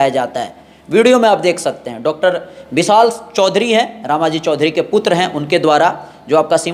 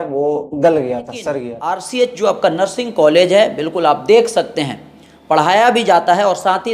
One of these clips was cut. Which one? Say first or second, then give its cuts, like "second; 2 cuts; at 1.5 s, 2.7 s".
second; 1 cut; at 1.8 s